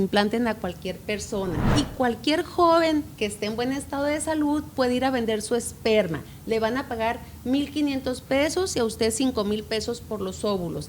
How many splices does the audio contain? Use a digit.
1